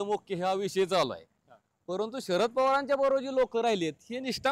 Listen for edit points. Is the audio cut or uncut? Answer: uncut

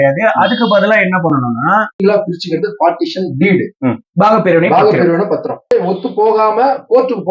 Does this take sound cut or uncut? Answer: cut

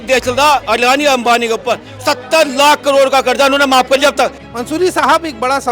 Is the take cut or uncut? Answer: cut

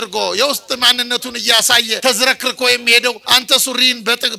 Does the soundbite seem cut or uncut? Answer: cut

